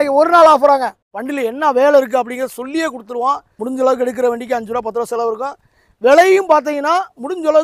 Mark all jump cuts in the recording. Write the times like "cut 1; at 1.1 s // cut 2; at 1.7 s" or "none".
cut 1; at 1.0 s // cut 2; at 3.5 s